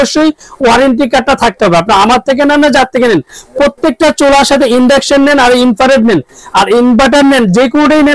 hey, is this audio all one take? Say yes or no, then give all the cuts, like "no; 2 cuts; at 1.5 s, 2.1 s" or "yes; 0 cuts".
yes; 0 cuts